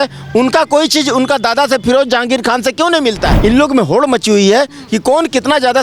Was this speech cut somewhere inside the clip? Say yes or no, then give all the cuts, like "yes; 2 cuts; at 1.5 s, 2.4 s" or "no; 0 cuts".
yes; 1 cut; at 3.3 s